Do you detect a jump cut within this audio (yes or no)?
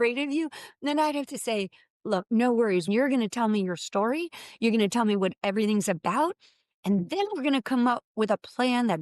yes